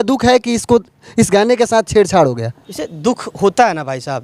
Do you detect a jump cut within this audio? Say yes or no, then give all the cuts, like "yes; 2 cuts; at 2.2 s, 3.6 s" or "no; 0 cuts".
no; 0 cuts